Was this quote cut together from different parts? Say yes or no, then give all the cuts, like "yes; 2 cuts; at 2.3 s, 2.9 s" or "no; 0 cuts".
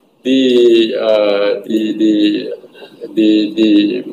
no; 0 cuts